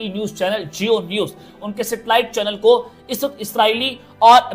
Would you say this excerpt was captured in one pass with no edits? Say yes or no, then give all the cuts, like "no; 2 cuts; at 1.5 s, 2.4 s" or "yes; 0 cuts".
no; 1 cut; at 1.6 s